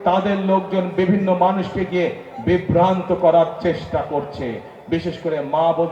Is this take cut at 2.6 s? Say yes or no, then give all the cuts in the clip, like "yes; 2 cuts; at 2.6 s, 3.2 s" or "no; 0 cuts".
no; 0 cuts